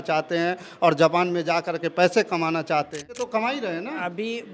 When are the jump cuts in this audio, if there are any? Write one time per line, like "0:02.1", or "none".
0:03.2